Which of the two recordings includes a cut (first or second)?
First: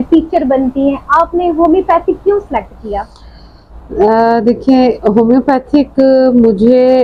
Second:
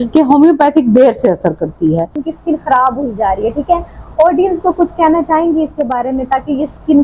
second